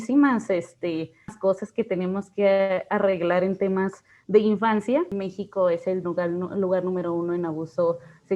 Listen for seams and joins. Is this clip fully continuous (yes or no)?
no